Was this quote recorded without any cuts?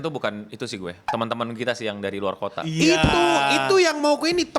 no; 1 cut; at 1.0 s

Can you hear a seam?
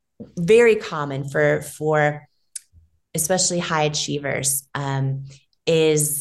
no; 0 cuts

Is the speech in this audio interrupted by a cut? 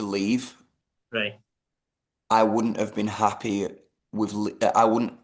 no; 0 cuts

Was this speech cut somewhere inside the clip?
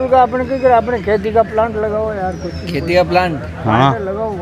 no; 0 cuts

